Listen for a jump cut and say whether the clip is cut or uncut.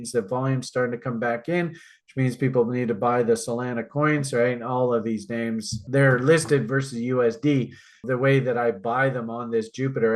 cut